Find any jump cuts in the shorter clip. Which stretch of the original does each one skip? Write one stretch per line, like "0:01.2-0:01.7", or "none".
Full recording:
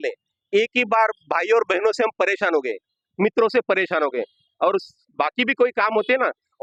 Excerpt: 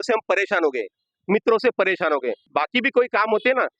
0:04.3-0:05.1